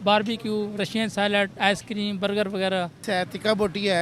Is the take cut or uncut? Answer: cut